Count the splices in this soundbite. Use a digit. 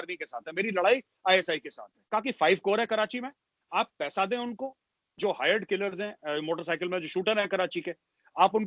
1